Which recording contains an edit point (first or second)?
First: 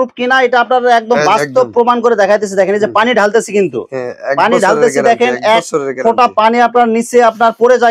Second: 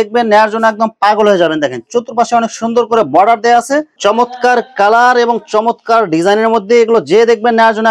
second